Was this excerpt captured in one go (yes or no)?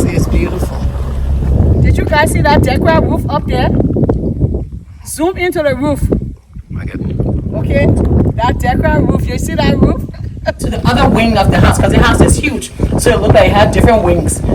no